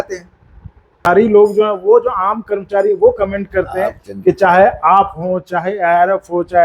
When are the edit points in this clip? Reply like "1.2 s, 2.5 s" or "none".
1.1 s